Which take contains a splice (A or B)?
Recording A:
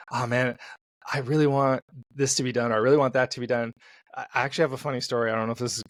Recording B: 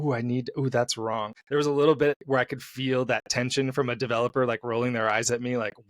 B